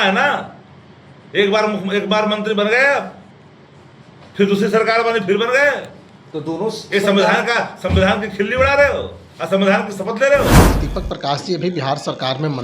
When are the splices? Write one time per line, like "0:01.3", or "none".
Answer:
0:10.8